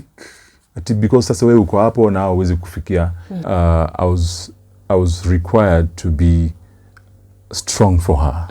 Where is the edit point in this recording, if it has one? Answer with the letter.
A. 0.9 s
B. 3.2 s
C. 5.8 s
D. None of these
B